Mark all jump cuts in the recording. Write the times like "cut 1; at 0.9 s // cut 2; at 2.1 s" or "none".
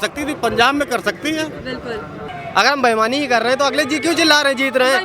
cut 1; at 2.2 s